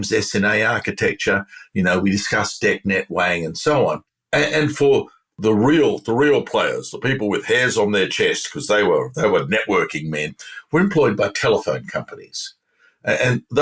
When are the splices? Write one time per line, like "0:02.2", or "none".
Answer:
0:05.3